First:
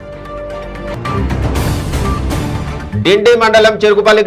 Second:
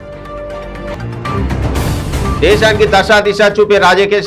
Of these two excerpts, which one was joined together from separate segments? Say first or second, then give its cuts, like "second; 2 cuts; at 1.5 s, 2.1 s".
second; 1 cut; at 0.9 s